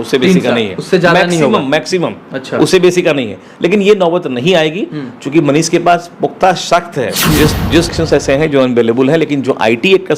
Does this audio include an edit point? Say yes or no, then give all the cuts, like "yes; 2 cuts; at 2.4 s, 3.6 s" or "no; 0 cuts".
yes; 1 cut; at 7.9 s